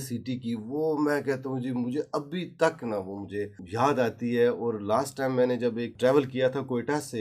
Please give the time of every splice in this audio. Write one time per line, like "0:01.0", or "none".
0:03.6
0:05.9